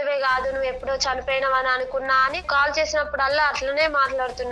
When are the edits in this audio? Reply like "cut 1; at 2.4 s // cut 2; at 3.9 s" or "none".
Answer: cut 1; at 2.5 s